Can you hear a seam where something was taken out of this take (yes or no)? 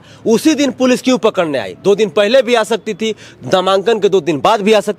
no